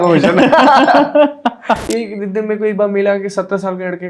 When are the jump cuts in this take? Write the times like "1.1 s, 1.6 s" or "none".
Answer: 1.8 s